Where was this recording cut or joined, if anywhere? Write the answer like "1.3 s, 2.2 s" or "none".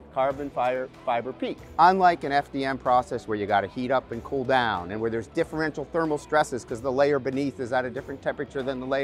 none